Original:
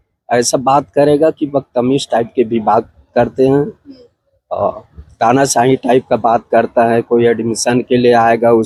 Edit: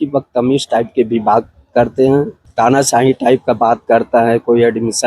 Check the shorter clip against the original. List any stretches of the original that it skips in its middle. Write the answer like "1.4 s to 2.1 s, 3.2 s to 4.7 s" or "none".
3.8 s to 5.0 s

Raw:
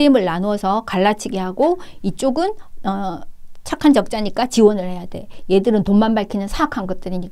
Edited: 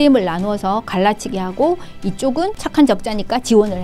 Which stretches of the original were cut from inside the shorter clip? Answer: 2.6 s to 3.7 s

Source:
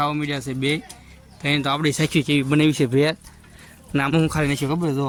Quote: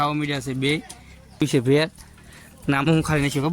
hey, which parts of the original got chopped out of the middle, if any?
1.4 s to 2.7 s

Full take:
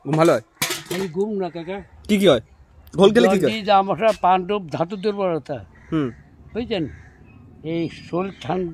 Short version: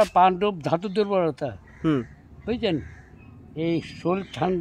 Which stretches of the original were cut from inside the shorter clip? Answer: none

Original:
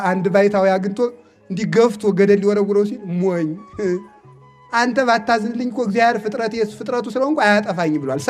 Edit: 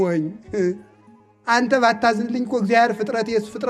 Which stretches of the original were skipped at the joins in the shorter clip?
none

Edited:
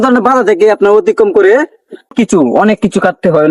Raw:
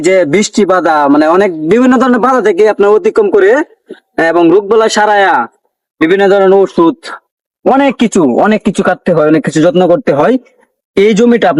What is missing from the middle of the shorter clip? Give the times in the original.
4.1 s to 7.9 s

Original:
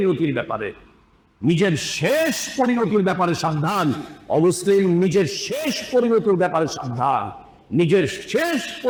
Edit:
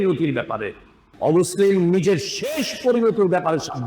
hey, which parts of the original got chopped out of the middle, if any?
1.0 s to 4.1 s

